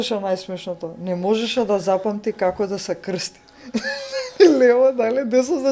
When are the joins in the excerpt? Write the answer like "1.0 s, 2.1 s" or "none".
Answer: none

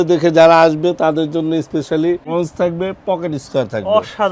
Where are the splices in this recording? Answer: 2.3 s

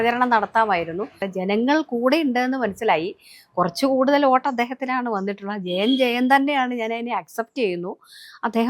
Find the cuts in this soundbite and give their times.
1.2 s

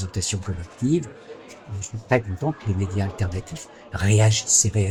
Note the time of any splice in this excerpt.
none

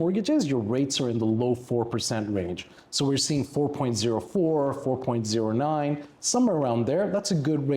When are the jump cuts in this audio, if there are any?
none

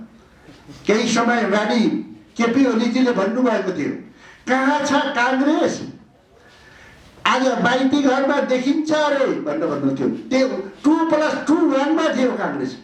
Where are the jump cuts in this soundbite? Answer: none

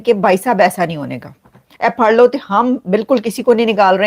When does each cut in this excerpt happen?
1.6 s

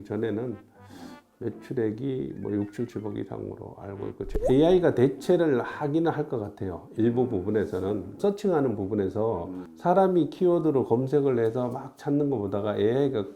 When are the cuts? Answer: 4.3 s, 8.2 s

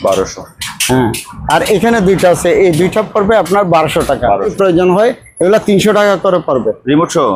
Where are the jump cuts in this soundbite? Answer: 4.5 s

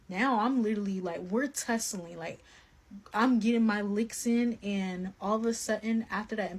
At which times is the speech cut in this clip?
none

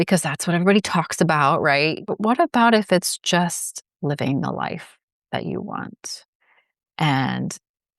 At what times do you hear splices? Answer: 2.0 s

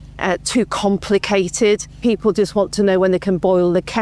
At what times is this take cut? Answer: 2.0 s

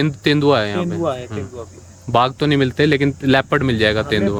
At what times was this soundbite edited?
none

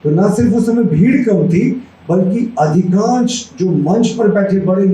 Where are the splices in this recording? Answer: none

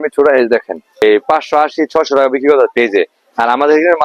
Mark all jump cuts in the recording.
1.0 s

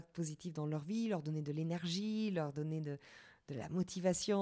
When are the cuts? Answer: none

